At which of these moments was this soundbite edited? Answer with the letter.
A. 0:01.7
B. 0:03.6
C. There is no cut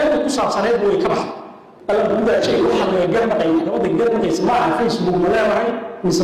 A